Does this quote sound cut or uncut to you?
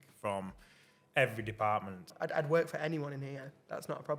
cut